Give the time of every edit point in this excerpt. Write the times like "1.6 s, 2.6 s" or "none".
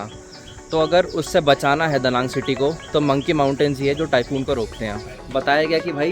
5.2 s